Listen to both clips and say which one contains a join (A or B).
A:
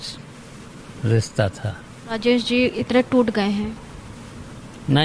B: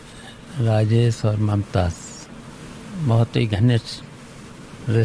A